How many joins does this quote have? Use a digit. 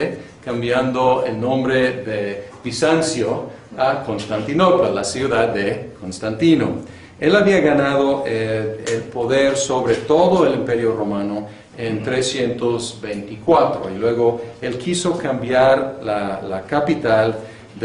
0